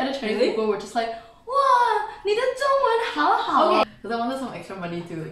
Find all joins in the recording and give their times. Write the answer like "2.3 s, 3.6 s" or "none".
3.8 s